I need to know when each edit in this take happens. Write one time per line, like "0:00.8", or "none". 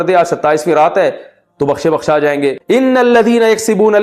0:02.5

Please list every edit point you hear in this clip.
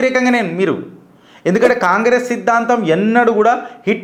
none

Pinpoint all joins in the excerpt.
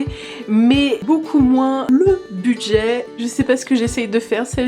0:01.0
0:01.9

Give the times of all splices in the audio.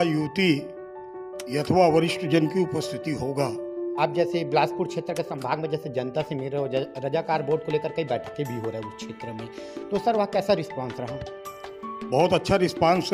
0:03.8

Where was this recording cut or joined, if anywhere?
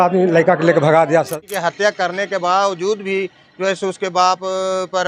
0:01.4

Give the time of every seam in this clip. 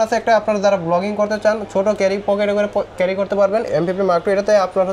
0:03.7

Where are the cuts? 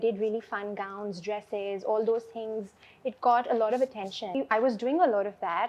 0:04.4

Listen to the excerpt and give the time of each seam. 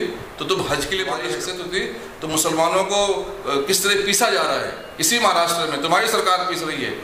0:01.3

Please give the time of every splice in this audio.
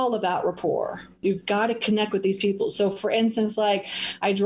0:01.1

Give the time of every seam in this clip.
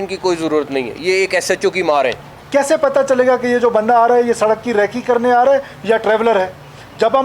0:02.3

